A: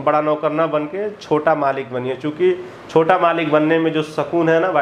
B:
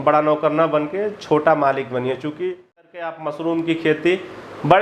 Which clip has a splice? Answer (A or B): B